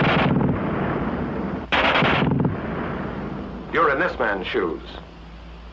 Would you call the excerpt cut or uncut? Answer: cut